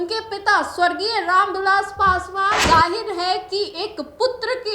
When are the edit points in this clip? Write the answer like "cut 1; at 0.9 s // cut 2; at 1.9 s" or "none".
cut 1; at 2.6 s